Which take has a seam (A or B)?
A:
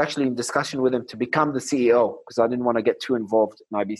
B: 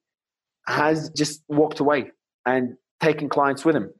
B